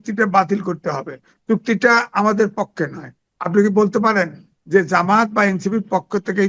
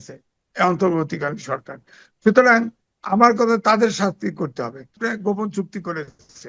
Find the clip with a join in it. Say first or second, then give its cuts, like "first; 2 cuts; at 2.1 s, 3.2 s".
second; 1 cut; at 5.0 s